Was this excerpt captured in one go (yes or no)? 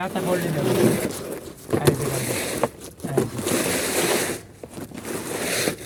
yes